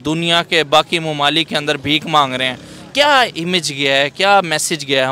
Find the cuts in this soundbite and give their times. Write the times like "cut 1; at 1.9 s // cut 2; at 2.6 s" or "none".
none